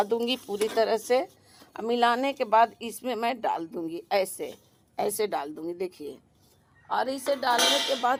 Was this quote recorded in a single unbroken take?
yes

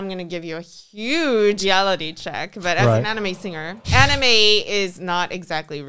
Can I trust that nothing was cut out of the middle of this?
no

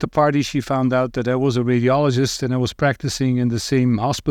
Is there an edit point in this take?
no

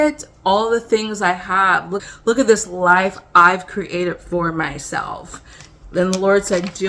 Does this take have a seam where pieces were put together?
yes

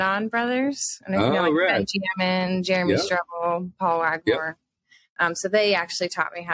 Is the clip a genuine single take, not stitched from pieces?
yes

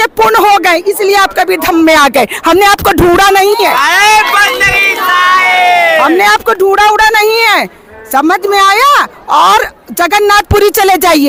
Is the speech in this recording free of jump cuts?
yes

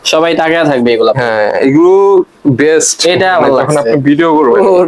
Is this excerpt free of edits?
yes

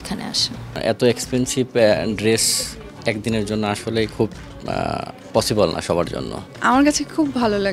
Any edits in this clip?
yes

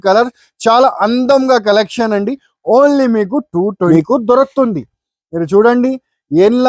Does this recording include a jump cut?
yes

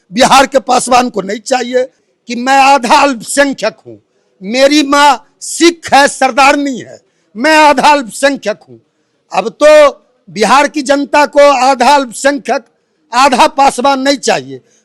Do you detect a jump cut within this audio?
yes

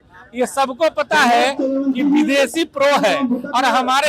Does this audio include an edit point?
no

